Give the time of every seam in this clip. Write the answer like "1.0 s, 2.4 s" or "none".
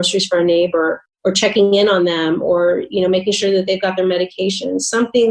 1.1 s